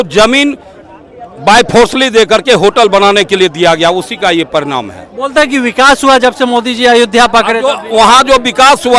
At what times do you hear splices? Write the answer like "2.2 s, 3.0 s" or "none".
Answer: none